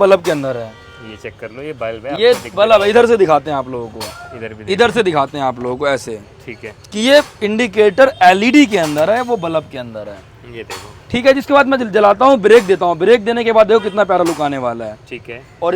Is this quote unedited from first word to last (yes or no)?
yes